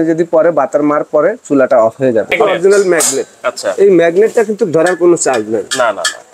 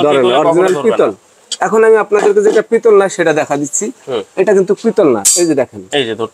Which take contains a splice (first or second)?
first